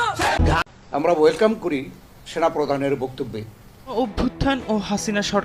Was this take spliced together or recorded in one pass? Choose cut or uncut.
cut